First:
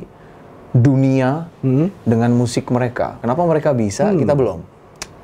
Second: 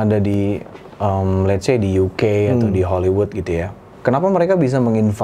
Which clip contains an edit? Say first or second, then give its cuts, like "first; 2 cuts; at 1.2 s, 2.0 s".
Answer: first; 1 cut; at 3.2 s